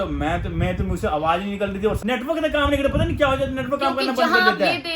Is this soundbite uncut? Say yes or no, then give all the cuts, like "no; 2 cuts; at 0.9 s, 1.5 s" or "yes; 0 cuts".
no; 1 cut; at 2.0 s